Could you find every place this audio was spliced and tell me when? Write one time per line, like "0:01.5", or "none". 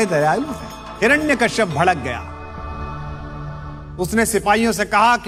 none